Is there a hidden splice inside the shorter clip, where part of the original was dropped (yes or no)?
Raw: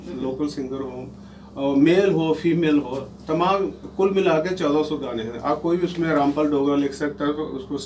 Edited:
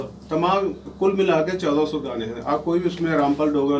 no